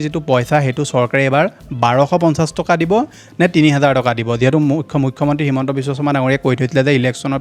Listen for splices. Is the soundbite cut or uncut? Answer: uncut